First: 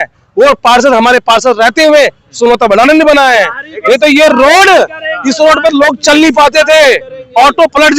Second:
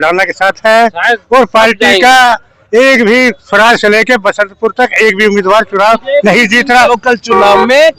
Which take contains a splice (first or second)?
second